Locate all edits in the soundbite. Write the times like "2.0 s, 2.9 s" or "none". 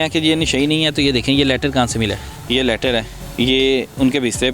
2.3 s, 3.2 s